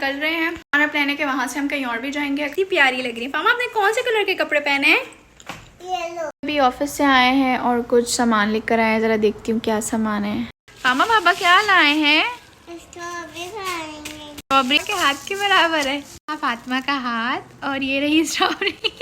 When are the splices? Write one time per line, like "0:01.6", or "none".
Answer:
0:02.5
0:06.3
0:14.8